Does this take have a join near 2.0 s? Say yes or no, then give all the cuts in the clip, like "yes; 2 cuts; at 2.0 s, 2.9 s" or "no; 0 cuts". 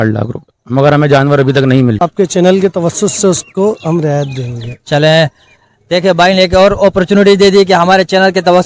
yes; 1 cut; at 2.0 s